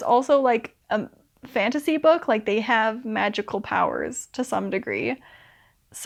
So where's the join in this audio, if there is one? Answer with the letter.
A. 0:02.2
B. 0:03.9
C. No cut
C